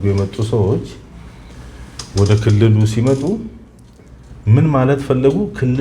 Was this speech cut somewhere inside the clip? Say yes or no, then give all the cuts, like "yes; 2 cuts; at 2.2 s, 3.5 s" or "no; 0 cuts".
no; 0 cuts